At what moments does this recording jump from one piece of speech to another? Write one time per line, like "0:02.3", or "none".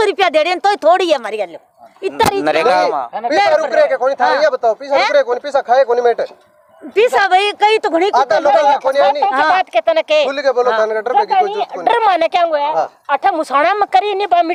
none